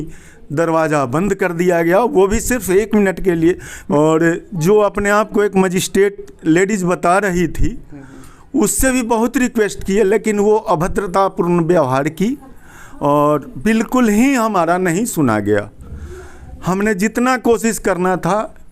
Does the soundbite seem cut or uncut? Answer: cut